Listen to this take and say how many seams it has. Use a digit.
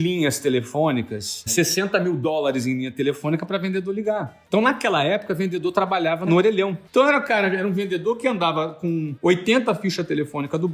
3